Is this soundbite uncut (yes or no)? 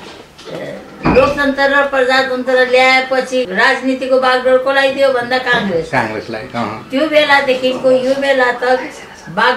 no